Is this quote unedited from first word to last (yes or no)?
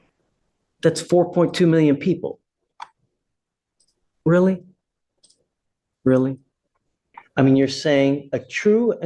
no